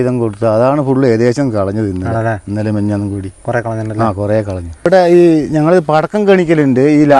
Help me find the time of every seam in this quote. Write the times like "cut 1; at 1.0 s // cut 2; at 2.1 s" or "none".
cut 1; at 4.8 s